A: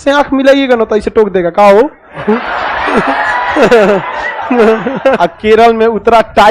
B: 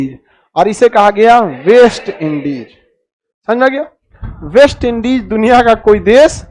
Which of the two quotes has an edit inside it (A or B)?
A